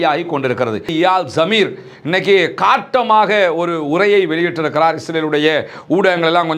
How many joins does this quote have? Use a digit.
1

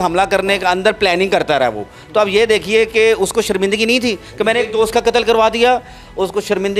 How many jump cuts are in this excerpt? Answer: 0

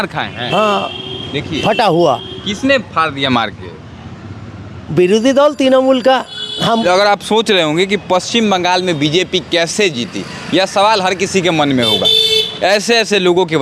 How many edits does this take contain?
1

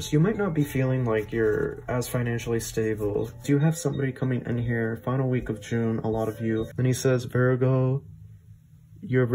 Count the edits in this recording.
2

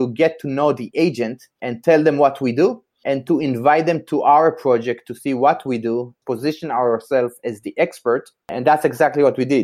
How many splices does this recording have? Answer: 1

